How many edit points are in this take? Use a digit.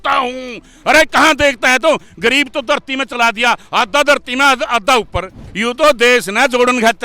1